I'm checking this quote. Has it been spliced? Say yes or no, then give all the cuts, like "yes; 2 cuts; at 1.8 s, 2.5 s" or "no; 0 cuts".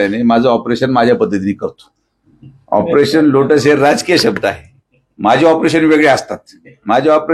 no; 0 cuts